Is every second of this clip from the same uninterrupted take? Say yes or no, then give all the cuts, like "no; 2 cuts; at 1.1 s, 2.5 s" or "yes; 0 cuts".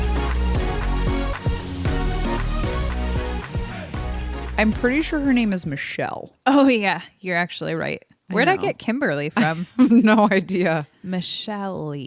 no; 1 cut; at 4.5 s